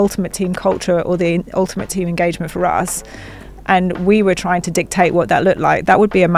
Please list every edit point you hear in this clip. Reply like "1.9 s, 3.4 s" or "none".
none